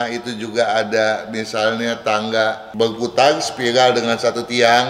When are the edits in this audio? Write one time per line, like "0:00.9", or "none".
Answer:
0:02.6